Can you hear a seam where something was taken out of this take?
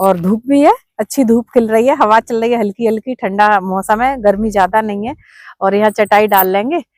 no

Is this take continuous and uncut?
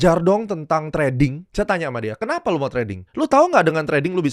no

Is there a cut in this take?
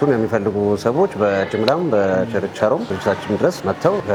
no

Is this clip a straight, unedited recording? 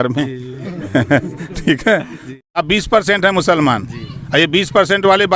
no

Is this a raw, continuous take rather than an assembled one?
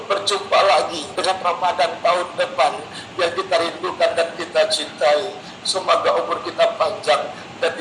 no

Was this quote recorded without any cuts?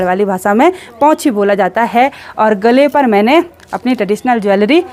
yes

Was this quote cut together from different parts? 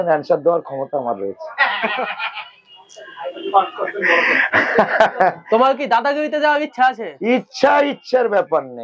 no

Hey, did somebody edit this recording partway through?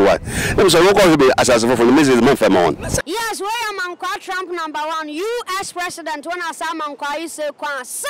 yes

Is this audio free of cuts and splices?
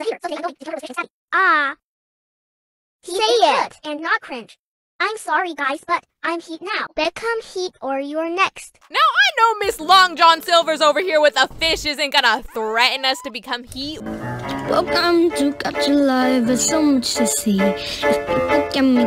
yes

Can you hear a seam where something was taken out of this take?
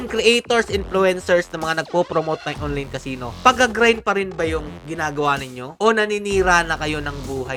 no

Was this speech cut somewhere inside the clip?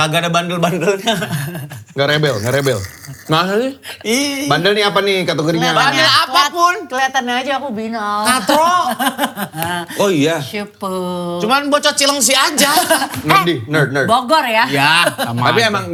no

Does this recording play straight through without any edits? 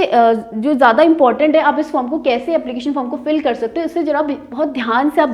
yes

